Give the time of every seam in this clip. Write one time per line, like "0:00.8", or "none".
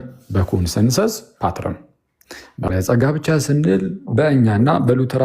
0:02.7